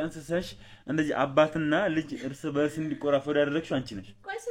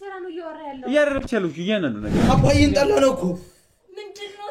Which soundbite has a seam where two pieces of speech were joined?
second; 1 cut; at 2.1 s

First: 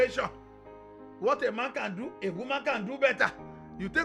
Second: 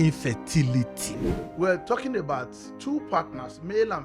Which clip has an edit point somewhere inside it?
second; 1 cut; at 1.2 s

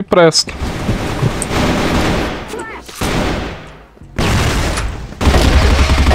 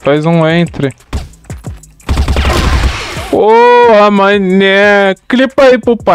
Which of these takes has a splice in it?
first; 1 cut; at 1.5 s

